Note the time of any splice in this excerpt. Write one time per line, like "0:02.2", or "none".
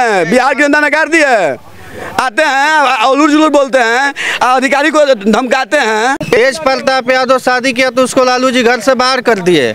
0:06.2